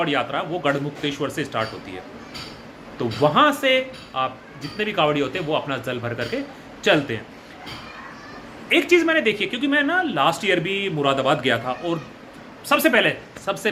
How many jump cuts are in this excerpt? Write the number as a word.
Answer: zero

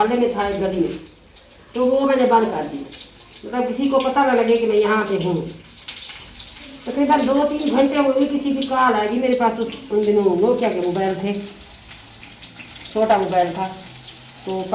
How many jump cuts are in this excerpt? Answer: zero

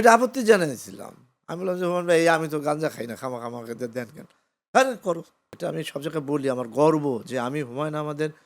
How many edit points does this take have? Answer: one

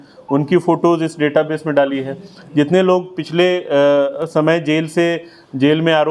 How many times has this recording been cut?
zero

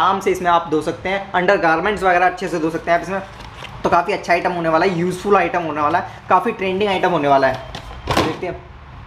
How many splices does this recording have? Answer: zero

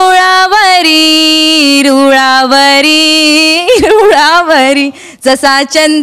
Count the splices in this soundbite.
one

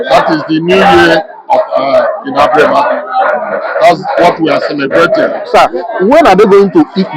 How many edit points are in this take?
one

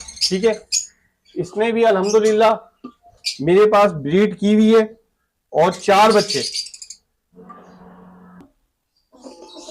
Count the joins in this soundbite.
one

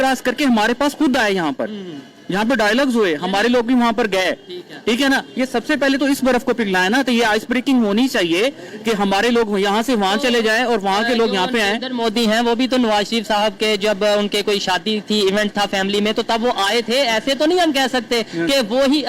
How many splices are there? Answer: zero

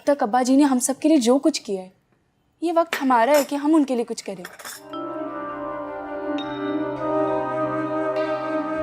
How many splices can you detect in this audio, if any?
one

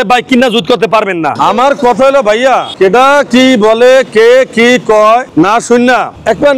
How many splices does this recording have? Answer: one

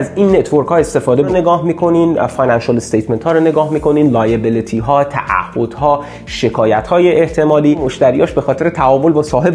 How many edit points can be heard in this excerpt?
two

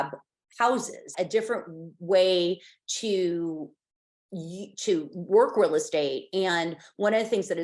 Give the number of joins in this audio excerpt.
one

